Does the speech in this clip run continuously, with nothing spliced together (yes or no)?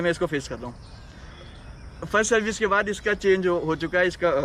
yes